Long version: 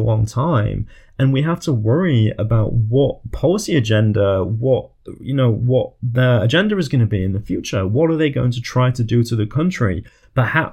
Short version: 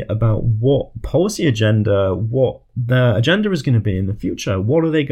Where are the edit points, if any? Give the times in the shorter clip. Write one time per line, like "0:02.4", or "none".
0:02.7